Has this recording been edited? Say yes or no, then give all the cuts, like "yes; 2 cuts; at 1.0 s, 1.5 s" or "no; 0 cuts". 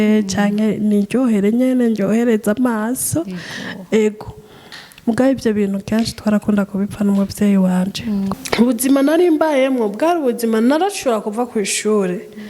yes; 1 cut; at 8.3 s